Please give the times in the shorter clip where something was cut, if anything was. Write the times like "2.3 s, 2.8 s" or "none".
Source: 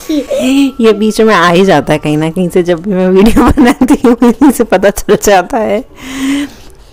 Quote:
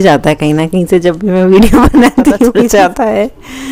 2.8 s